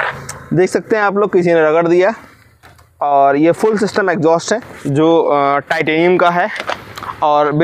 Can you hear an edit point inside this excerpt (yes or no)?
no